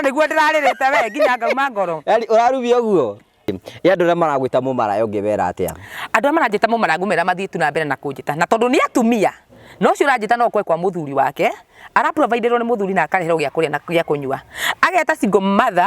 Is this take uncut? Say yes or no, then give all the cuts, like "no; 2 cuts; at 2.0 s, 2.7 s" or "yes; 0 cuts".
no; 1 cut; at 3.5 s